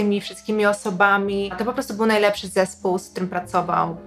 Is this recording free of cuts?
no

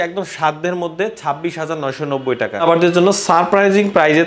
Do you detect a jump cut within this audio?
yes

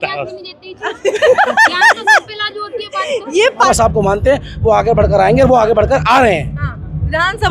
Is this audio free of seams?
no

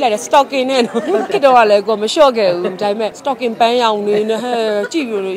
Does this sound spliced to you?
yes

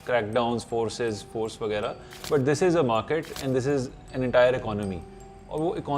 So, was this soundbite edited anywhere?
yes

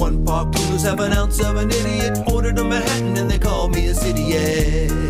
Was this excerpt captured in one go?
yes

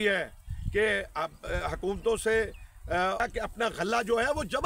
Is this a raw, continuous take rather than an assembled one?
no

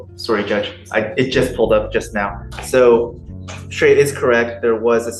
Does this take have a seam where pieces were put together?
no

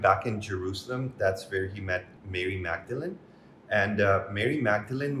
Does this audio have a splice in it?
no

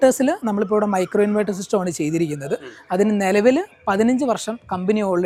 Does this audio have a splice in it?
no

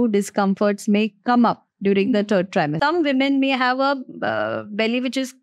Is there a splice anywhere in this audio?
yes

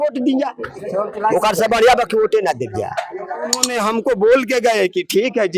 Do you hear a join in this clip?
yes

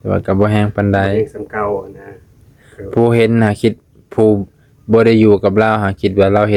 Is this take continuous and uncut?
yes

